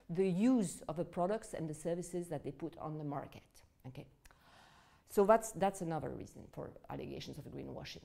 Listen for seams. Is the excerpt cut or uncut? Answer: uncut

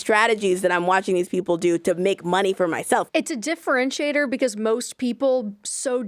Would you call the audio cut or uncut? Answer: cut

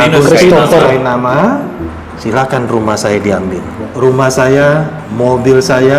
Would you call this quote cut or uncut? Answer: cut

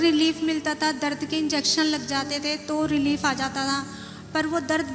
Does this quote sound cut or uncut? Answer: uncut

